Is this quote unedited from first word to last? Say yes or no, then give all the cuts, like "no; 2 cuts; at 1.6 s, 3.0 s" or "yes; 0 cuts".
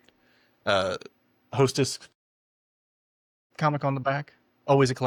yes; 0 cuts